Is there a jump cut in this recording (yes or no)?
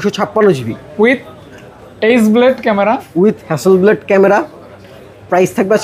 no